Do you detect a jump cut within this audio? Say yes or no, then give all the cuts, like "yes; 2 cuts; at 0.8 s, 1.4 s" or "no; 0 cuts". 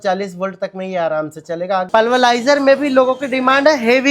yes; 1 cut; at 1.9 s